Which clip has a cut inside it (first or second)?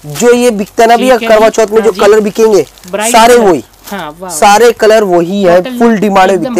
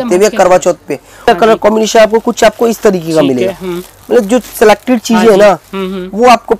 second